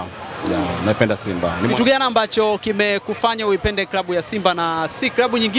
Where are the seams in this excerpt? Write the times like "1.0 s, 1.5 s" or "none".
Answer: none